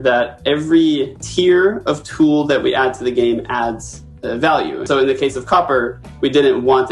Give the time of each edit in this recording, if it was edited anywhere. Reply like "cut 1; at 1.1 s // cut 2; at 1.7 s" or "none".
cut 1; at 1.2 s // cut 2; at 4.8 s